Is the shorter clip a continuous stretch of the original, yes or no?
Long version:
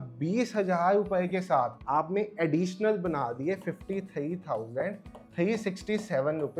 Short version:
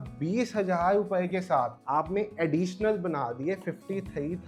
yes